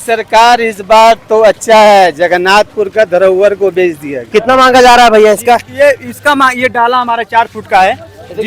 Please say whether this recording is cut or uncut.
cut